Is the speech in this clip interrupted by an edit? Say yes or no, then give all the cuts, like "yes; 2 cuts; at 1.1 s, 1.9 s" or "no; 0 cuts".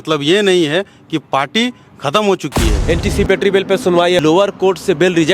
yes; 2 cuts; at 2.7 s, 4.2 s